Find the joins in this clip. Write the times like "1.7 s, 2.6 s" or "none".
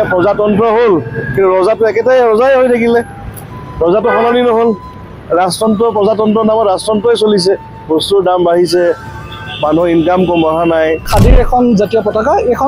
11.1 s